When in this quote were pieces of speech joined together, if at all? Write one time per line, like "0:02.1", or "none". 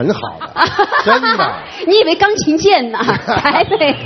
none